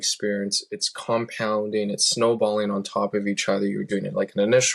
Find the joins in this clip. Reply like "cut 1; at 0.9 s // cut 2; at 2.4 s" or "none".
none